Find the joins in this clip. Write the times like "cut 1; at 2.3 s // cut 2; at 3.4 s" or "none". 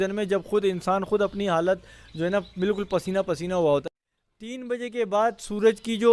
cut 1; at 3.8 s